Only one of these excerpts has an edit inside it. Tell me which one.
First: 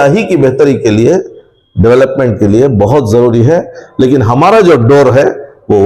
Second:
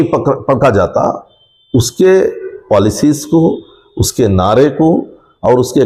first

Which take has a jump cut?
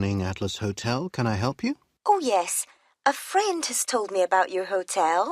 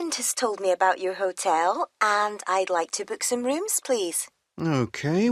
first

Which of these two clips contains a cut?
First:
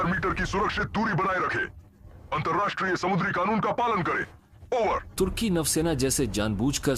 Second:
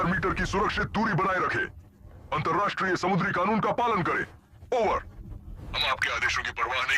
second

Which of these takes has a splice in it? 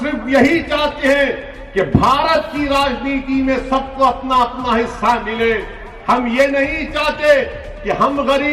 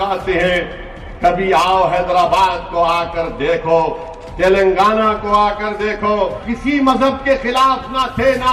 second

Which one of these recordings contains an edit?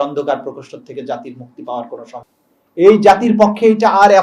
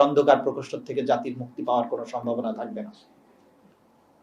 first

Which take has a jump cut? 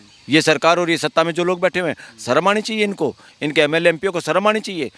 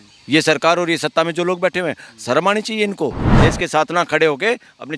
second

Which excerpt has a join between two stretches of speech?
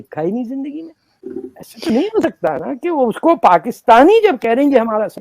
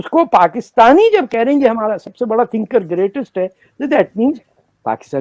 first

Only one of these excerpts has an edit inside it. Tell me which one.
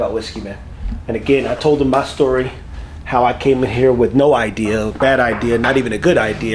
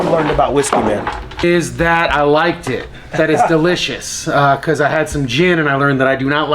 second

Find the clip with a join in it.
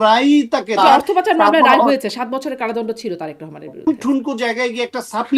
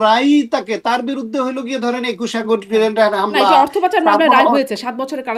first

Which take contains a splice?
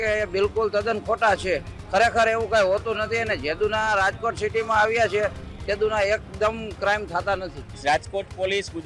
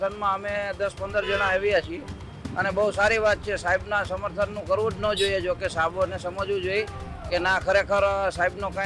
first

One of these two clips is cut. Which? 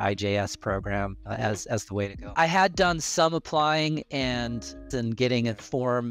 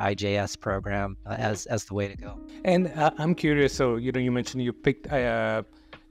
first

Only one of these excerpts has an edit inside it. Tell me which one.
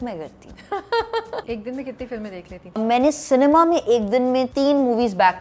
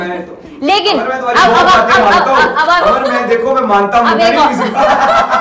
first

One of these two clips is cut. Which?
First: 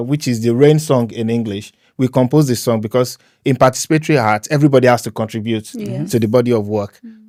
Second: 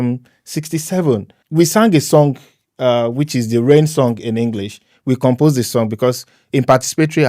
second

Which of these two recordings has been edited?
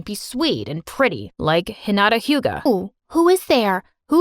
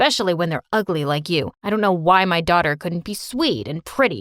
first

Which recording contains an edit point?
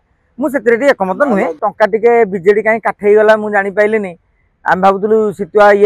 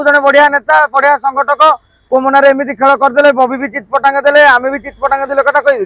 first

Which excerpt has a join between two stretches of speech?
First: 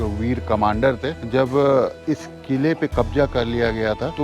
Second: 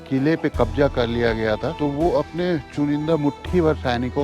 first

